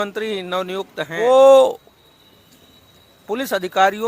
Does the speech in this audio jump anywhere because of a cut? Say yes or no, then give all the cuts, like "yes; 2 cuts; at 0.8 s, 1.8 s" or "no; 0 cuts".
yes; 1 cut; at 1.2 s